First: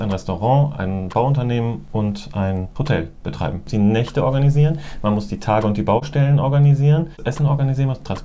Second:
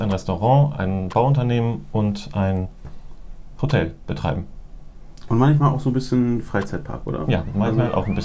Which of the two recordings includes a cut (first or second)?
first